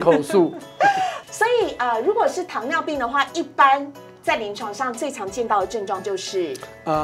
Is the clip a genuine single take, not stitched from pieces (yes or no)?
no